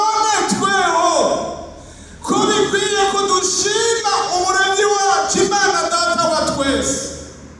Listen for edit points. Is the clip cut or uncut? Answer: uncut